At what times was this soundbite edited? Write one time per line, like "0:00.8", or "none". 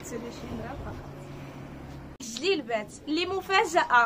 0:02.3